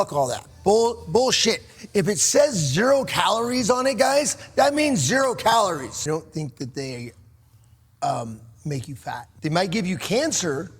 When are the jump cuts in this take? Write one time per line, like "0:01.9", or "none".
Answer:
0:06.0
0:09.3